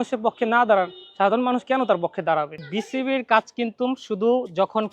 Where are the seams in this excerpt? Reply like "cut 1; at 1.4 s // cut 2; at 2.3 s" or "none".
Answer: none